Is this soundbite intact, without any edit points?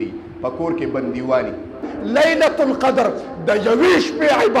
no; 1 cut; at 1.9 s

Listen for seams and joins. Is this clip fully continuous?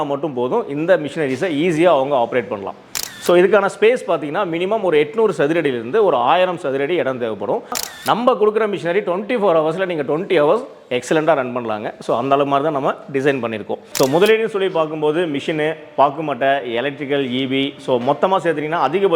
no; 2 cuts; at 7.8 s, 13.8 s

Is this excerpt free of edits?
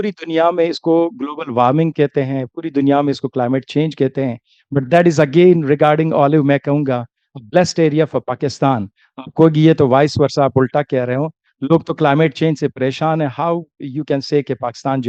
yes; 0 cuts

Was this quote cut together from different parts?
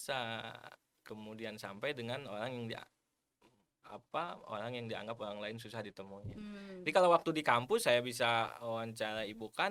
no; 0 cuts

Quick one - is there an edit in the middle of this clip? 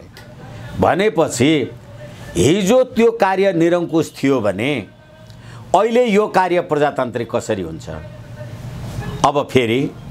no; 0 cuts

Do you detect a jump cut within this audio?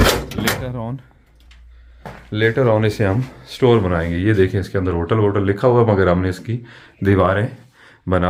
no; 0 cuts

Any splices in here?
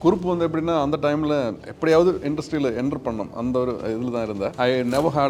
yes; 2 cuts; at 1.6 s, 4.5 s

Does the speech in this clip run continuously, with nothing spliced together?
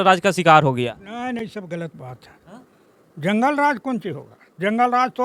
yes; 0 cuts

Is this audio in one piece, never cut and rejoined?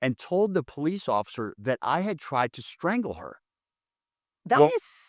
yes; 0 cuts

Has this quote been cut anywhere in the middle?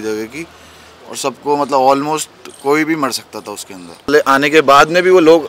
yes; 1 cut; at 4.1 s

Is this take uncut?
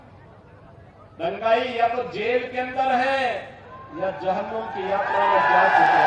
yes; 0 cuts

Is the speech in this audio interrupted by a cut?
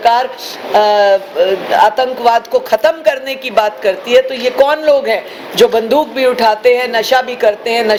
no; 0 cuts

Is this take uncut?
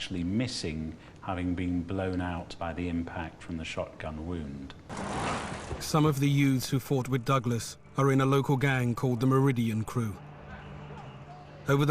no; 1 cut; at 4.8 s

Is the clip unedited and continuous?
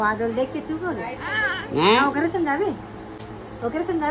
yes; 0 cuts

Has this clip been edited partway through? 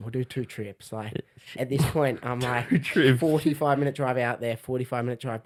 no; 0 cuts

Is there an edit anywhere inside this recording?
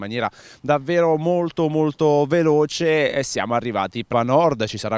no; 0 cuts

